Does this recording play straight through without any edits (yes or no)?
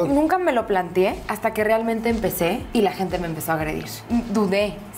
no